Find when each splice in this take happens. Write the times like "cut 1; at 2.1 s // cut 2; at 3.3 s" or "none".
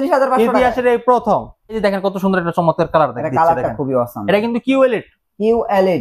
cut 1; at 1.8 s